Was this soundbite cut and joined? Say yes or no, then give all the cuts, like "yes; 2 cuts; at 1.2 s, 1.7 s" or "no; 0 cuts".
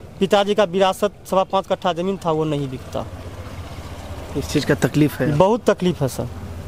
no; 0 cuts